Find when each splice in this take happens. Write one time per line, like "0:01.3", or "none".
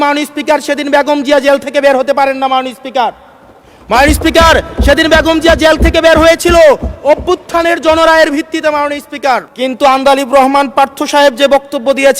0:09.5